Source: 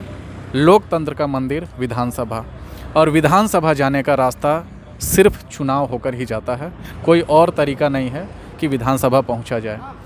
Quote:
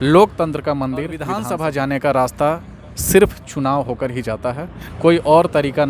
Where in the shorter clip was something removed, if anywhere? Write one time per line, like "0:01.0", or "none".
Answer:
0:01.4